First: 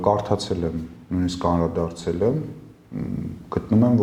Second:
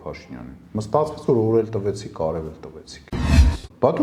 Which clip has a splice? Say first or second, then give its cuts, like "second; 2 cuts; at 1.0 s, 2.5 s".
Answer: second; 1 cut; at 3.1 s